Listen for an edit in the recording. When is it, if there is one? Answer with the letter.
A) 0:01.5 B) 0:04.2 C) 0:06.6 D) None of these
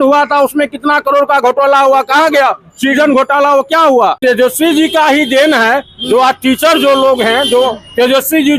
B